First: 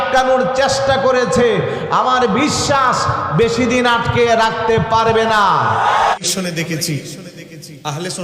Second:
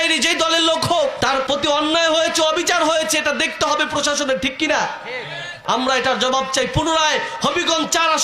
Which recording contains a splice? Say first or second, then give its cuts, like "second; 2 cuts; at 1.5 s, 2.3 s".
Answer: first; 1 cut; at 6.2 s